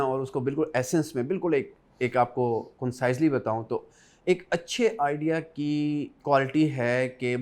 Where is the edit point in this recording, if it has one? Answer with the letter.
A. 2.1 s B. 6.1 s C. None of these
B